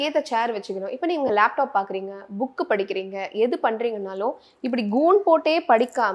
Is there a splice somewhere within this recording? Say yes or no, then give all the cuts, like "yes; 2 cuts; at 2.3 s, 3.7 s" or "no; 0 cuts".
no; 0 cuts